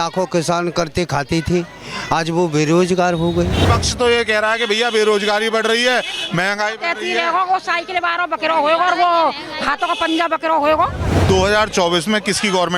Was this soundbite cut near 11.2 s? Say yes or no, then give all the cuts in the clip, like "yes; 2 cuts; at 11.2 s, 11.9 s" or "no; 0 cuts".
yes; 2 cuts; at 3.7 s, 11.2 s